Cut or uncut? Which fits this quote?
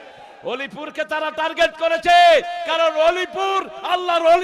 uncut